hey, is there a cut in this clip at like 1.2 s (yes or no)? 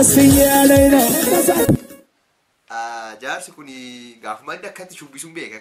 yes